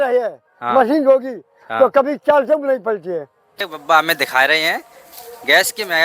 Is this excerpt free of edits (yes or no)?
no